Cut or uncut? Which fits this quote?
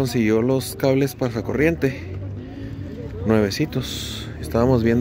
uncut